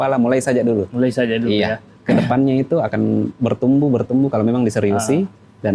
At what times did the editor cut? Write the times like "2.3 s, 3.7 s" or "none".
1.9 s

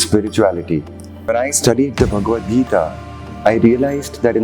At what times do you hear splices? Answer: 1.3 s

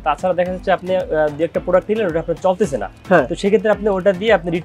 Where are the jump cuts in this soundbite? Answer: none

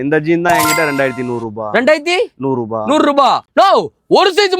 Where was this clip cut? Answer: 3.5 s

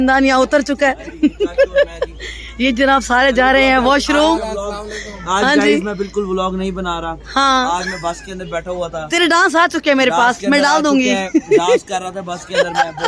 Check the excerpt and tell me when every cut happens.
none

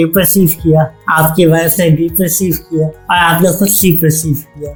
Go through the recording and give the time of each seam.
none

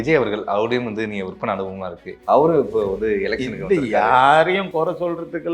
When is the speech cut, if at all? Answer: 2.1 s

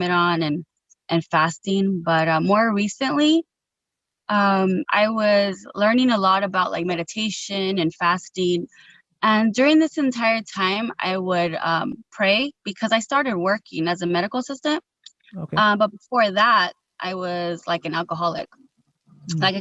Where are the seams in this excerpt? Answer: none

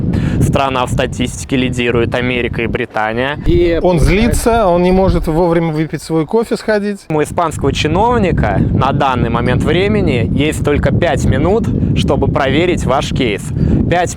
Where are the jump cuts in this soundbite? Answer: 3.4 s, 7.1 s

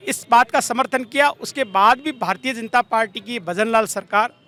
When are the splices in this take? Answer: none

